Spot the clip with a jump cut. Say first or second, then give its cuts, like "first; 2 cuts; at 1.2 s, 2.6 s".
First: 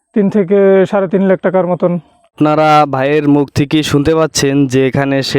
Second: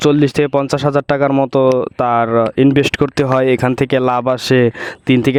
first; 1 cut; at 2.3 s